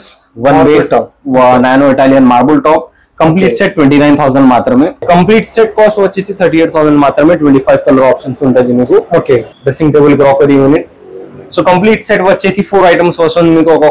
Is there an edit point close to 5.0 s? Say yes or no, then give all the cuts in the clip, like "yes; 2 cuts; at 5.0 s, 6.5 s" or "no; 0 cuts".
yes; 2 cuts; at 5.0 s, 9.5 s